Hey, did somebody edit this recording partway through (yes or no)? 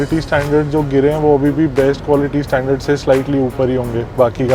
no